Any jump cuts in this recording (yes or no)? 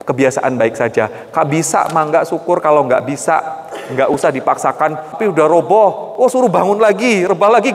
yes